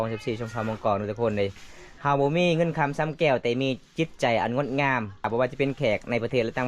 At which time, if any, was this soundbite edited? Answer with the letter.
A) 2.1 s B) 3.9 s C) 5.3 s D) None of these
C